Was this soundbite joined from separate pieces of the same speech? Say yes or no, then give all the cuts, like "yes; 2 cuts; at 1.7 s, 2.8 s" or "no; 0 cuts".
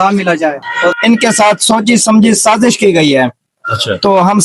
yes; 1 cut; at 1.0 s